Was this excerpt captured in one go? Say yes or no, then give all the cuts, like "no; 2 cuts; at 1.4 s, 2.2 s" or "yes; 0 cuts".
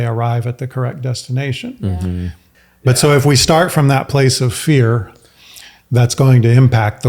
no; 1 cut; at 2.5 s